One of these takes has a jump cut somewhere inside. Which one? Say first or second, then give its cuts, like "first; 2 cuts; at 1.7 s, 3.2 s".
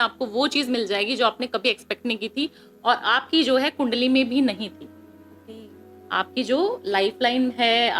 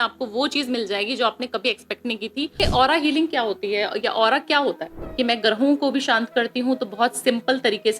second; 2 cuts; at 2.6 s, 5.0 s